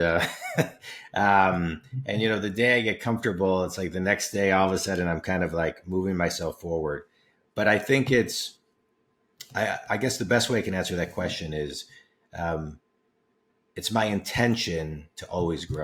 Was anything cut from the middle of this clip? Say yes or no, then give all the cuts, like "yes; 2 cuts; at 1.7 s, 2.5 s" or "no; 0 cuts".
no; 0 cuts